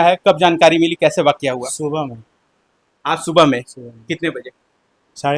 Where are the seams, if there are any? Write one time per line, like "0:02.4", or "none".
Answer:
none